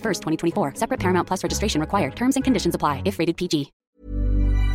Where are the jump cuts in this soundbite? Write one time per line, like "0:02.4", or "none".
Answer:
0:03.8